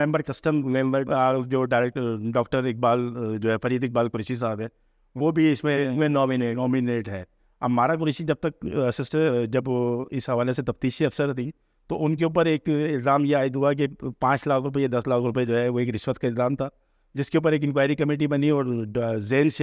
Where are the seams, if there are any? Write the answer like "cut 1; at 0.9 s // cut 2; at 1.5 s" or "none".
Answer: cut 1; at 7.4 s